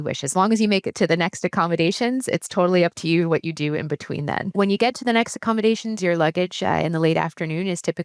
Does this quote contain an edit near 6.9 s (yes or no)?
no